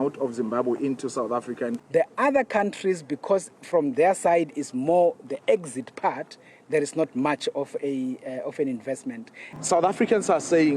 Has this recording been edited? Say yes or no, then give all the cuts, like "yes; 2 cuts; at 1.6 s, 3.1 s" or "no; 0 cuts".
yes; 2 cuts; at 1.8 s, 9.5 s